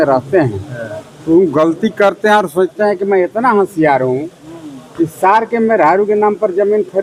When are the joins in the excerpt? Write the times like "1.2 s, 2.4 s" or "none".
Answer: none